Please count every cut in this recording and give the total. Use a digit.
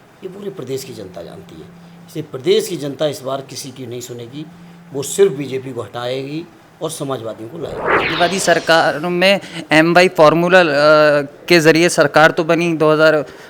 1